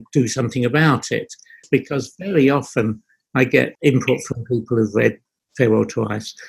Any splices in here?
yes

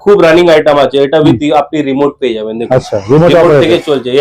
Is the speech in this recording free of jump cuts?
yes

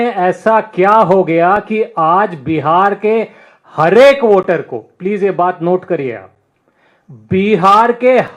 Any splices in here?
no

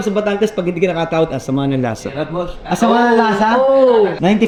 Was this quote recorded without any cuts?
yes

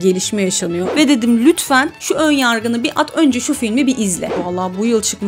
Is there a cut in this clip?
yes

